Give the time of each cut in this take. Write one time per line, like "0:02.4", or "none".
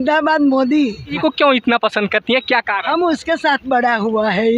0:01.2